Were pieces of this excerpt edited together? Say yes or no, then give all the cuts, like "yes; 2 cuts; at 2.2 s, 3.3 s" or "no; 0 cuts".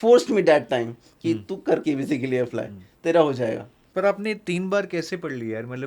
yes; 1 cut; at 3.7 s